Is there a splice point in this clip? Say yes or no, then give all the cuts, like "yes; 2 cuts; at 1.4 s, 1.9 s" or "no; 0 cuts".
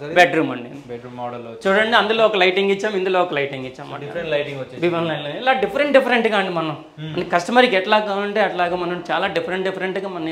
no; 0 cuts